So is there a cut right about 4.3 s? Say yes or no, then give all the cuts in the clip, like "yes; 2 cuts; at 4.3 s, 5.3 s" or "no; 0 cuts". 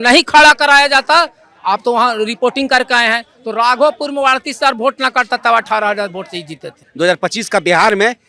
no; 1 cut; at 6.9 s